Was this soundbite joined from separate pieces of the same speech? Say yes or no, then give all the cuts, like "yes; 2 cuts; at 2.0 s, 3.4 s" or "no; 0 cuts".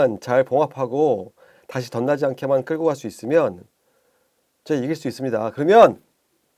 no; 0 cuts